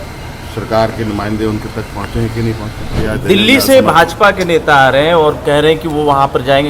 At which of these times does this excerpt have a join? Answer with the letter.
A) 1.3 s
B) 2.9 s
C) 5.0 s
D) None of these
B